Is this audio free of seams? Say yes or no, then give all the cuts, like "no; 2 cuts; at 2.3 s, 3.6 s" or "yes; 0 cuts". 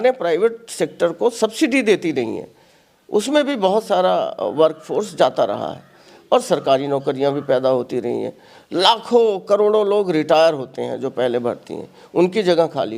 yes; 0 cuts